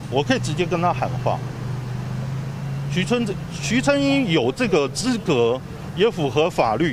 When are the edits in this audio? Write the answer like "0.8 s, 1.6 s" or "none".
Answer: none